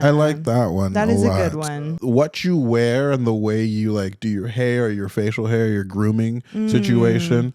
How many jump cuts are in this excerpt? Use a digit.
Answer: 1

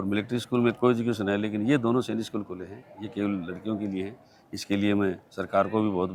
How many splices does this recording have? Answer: 0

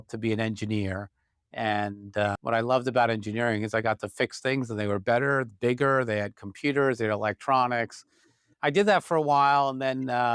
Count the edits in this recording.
1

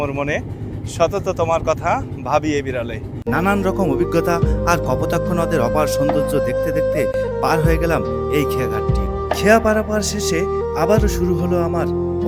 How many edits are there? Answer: 0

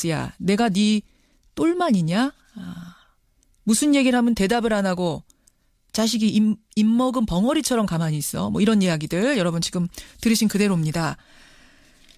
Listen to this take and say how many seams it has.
1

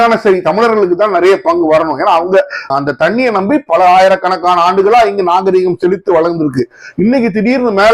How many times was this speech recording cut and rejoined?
0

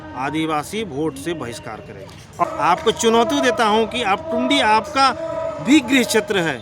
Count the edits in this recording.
1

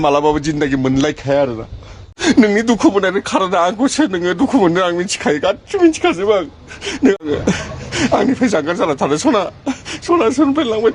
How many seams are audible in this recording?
2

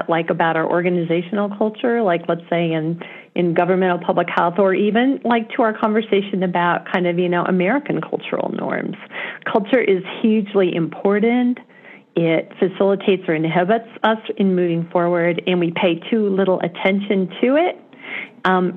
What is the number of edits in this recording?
0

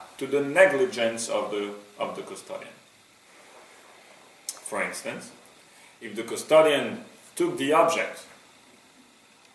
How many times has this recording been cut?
1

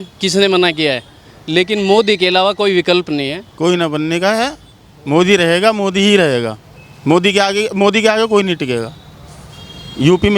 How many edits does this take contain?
1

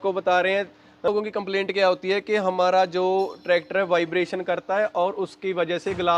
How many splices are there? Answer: 1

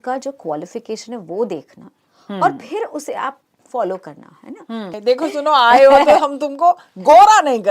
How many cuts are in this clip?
1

